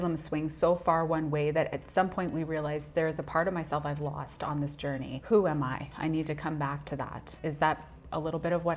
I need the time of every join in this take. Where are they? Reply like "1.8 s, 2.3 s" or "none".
5.2 s, 7.2 s